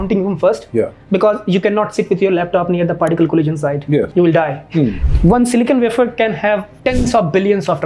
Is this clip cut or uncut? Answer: cut